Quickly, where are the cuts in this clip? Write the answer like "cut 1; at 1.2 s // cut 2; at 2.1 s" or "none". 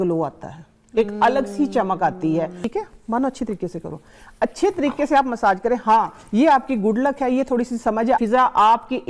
cut 1; at 2.6 s // cut 2; at 8.2 s